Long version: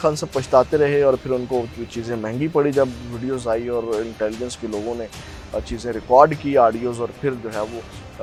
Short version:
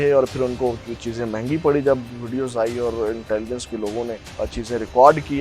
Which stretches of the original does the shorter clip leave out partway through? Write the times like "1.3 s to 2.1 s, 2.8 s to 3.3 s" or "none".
5.2 s to 5.4 s